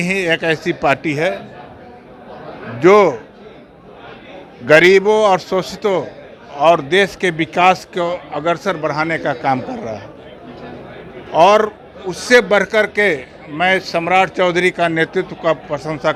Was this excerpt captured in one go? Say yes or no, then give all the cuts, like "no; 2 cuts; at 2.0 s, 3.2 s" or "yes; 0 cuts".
yes; 0 cuts